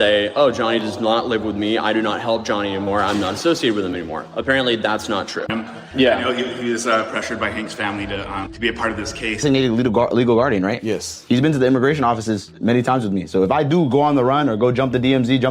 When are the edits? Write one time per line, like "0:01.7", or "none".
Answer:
0:05.5
0:09.4